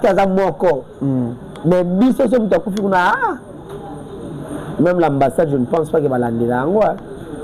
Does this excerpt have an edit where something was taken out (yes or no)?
no